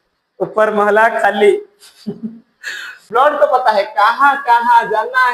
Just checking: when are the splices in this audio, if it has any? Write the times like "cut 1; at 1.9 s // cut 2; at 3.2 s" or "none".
cut 1; at 3.1 s